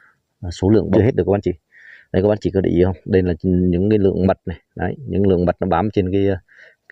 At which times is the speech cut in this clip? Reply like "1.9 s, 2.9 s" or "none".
1.0 s

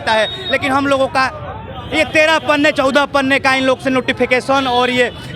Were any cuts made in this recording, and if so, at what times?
none

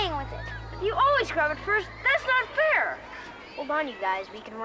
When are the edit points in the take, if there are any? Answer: none

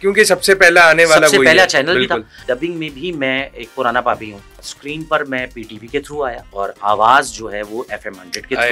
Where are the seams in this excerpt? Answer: 2.3 s, 4.6 s, 6.4 s

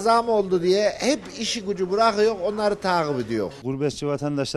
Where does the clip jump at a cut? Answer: 3.6 s

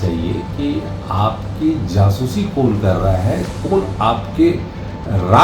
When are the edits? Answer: none

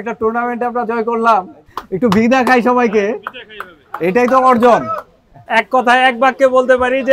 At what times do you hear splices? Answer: 5.4 s

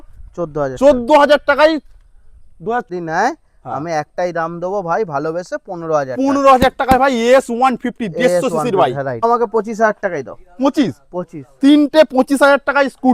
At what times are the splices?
2.9 s, 9.2 s

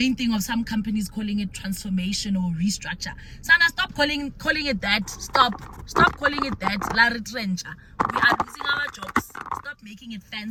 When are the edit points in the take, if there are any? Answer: none

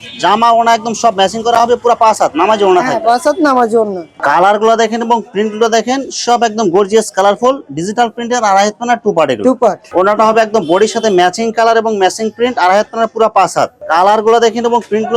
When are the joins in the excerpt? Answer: 4.1 s, 9.8 s, 13.8 s

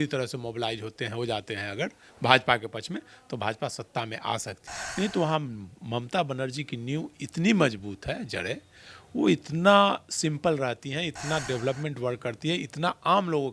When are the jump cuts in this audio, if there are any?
4.6 s

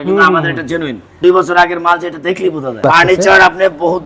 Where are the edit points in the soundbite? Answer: 1.2 s, 2.8 s

